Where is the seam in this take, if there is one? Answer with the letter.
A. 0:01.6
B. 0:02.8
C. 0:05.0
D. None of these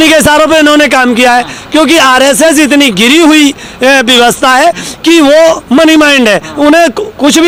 D